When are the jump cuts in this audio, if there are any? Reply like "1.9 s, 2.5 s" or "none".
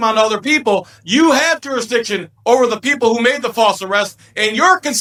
none